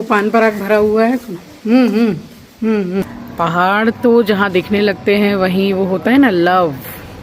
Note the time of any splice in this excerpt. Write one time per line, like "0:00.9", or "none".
0:03.1